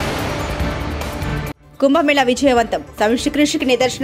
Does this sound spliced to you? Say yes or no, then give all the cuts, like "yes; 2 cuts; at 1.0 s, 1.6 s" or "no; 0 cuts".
yes; 1 cut; at 1.6 s